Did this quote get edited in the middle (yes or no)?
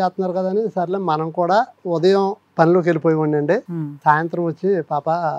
no